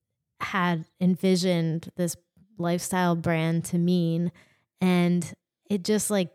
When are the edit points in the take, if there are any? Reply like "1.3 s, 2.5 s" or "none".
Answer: none